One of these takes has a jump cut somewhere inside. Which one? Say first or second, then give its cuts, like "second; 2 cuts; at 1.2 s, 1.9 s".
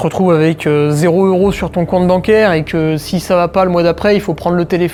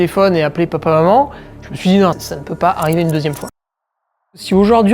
second; 2 cuts; at 2.3 s, 4.1 s